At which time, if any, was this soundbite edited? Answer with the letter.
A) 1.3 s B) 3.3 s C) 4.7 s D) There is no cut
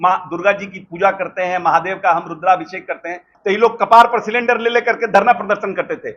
B